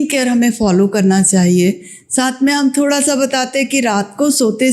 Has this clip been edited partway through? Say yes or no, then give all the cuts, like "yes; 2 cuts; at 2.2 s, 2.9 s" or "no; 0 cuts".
no; 0 cuts